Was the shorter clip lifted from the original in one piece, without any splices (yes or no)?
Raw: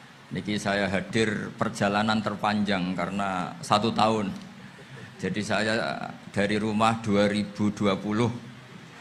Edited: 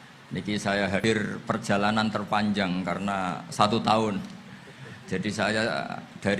no